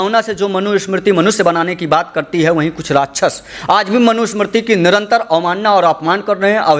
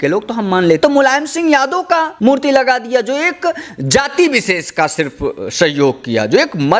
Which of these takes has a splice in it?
second; 2 cuts; at 0.8 s, 2.1 s

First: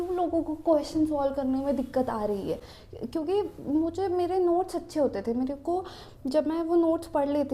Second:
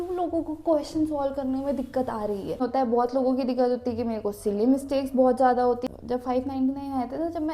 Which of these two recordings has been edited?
second; 2 cuts; at 2.6 s, 5.8 s

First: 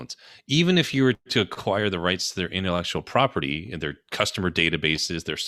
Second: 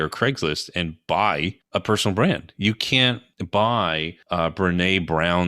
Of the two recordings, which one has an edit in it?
second; 3 cuts; at 1.3 s, 3.3 s, 4.1 s

